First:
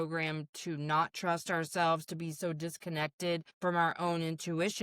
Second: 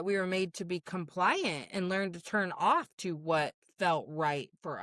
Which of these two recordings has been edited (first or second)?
first